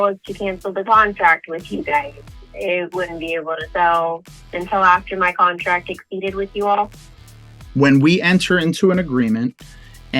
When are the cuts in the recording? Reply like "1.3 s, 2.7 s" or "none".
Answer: 7.2 s